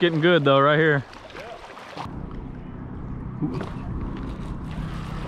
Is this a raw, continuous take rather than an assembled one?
no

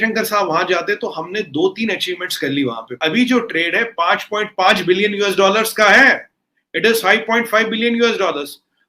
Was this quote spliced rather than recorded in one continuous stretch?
yes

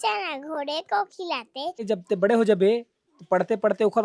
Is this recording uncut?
no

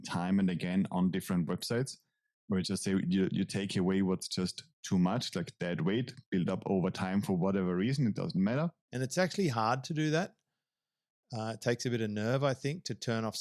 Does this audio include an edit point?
yes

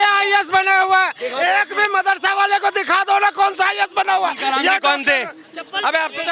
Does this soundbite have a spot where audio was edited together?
no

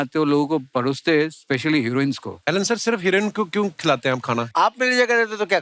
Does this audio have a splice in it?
yes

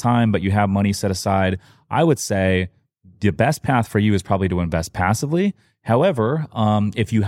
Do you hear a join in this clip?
no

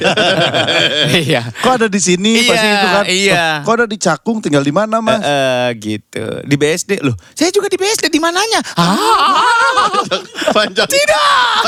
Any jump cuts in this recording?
no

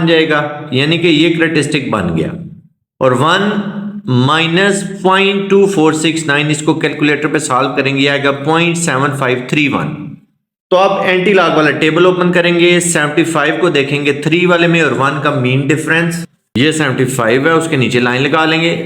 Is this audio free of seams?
no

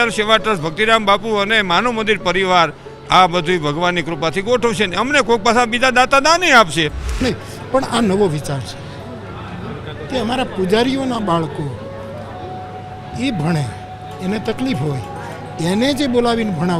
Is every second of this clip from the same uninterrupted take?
no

